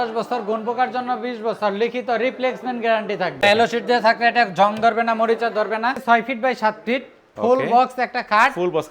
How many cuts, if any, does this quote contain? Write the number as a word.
two